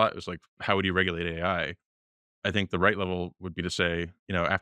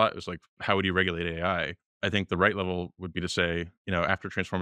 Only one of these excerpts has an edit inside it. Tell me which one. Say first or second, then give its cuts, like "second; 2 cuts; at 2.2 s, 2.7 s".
second; 1 cut; at 1.8 s